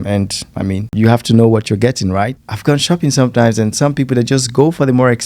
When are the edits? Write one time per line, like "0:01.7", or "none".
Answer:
0:02.4